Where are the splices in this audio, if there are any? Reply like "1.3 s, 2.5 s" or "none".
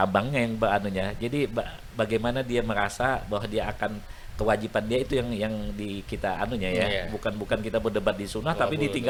none